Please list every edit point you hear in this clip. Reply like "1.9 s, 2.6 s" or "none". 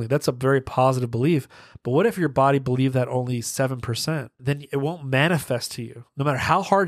4.4 s